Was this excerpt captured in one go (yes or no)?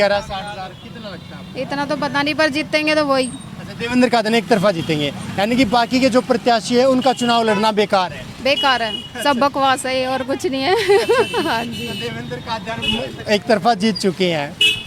yes